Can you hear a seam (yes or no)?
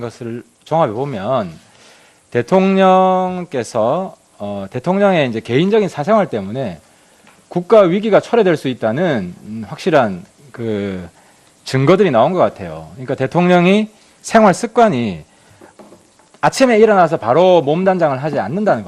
yes